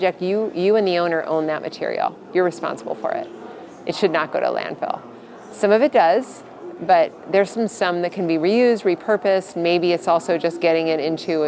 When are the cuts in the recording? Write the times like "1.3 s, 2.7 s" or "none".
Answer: none

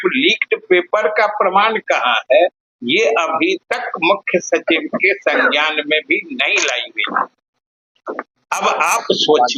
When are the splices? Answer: none

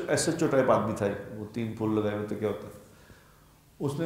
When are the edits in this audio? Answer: none

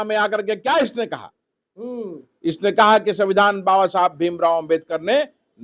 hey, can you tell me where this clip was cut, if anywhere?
none

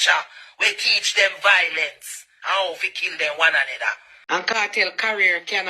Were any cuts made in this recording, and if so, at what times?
4.1 s

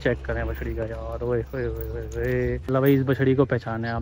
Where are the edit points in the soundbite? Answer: 2.7 s

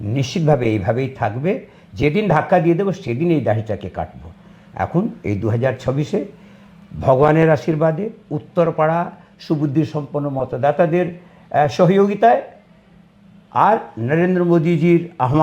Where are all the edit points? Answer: none

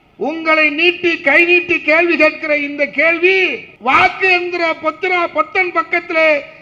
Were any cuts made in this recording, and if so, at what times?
3.7 s

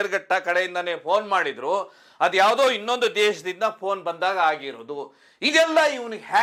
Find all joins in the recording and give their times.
none

